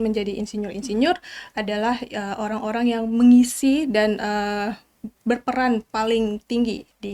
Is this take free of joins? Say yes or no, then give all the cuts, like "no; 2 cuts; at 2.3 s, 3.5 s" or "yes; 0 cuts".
yes; 0 cuts